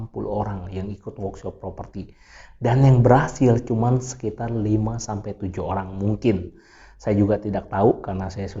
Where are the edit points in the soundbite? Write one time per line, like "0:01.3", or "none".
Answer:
none